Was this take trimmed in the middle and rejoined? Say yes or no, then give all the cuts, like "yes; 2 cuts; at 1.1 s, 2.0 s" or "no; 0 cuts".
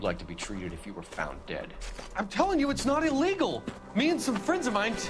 no; 0 cuts